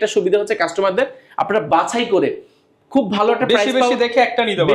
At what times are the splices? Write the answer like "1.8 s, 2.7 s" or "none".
none